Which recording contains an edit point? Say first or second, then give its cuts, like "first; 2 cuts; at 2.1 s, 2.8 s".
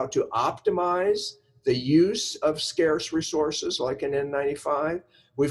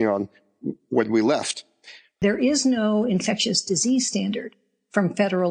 second; 1 cut; at 2.2 s